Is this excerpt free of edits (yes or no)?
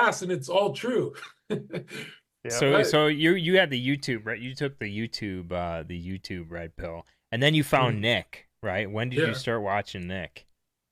yes